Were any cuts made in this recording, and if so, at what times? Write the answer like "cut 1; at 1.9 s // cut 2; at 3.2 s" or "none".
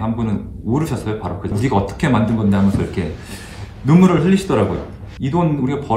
cut 1; at 1.5 s